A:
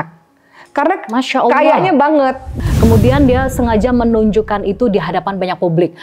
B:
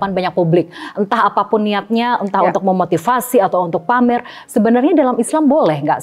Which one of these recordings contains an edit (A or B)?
A